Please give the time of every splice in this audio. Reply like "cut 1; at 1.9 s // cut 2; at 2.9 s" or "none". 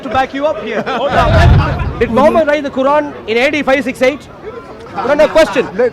cut 1; at 1.7 s